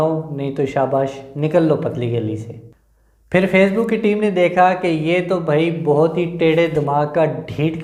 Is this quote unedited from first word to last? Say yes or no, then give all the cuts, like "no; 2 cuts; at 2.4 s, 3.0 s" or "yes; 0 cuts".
yes; 0 cuts